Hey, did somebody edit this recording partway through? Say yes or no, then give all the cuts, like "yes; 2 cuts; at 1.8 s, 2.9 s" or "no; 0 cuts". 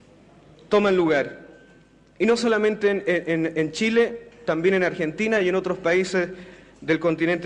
yes; 1 cut; at 2.9 s